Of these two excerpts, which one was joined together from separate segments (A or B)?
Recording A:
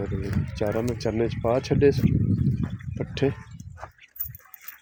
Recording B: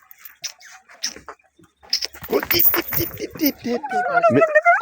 B